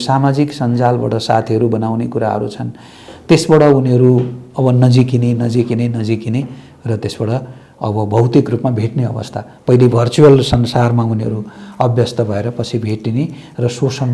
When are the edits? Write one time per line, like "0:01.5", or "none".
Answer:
none